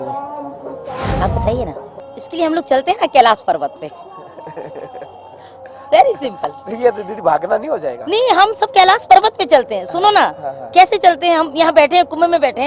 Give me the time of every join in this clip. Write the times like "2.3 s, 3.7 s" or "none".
2.0 s